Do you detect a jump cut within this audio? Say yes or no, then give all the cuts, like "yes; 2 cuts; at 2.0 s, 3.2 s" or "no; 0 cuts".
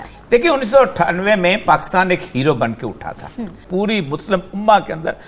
yes; 1 cut; at 3.6 s